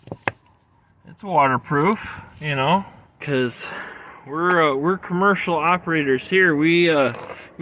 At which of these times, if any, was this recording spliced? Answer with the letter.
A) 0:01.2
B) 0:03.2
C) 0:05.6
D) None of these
B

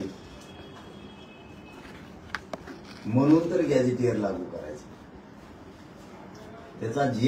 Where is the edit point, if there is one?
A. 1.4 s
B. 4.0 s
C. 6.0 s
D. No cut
D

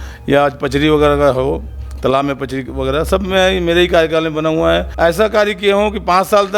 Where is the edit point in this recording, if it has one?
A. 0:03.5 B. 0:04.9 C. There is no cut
B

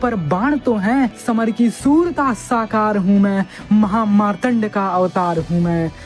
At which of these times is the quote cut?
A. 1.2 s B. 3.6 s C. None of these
A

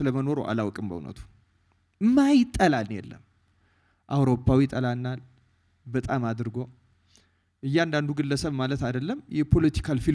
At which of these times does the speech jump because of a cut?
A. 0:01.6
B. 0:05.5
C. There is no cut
C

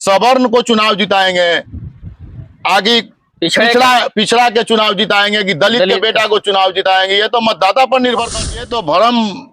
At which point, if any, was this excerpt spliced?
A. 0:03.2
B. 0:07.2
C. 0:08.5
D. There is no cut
C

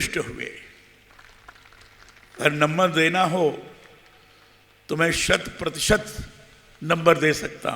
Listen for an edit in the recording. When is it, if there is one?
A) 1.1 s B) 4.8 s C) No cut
A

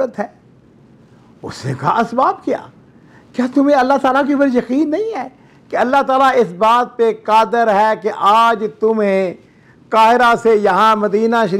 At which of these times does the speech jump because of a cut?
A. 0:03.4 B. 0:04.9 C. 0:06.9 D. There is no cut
D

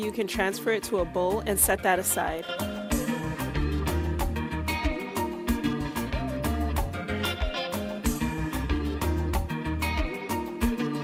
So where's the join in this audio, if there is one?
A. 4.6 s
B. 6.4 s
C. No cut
C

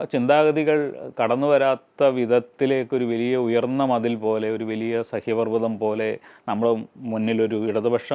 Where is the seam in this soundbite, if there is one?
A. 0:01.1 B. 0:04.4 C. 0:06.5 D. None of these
D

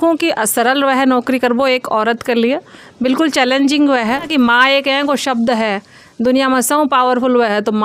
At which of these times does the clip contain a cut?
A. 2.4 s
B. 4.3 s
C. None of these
B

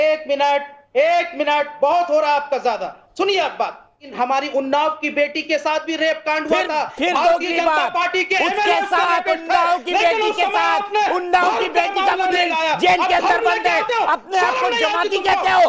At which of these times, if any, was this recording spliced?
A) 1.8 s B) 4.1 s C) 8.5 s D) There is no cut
B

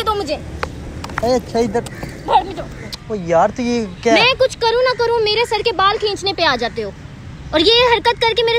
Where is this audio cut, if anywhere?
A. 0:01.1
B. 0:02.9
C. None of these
B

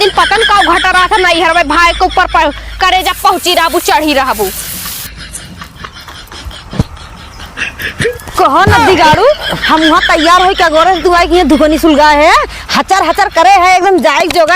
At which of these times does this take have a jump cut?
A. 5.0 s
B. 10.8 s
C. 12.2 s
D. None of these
A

